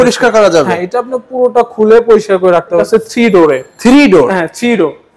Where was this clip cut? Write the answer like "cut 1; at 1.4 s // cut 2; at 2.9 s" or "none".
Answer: cut 1; at 2.8 s